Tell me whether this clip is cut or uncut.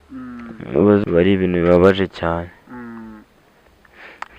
cut